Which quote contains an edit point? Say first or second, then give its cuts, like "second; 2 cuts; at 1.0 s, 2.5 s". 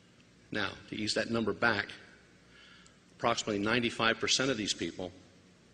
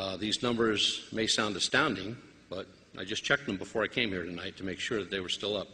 second; 1 cut; at 4.1 s